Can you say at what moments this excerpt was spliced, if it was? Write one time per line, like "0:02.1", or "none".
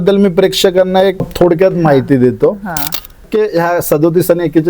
0:01.3
0:03.2